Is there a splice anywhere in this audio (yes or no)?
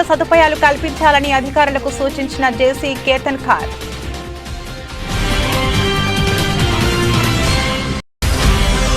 yes